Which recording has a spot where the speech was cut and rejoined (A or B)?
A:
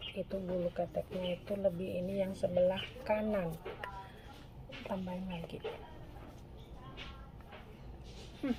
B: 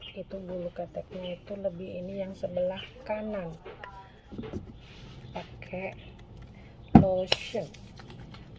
B